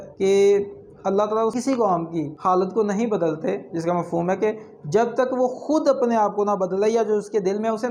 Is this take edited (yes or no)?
no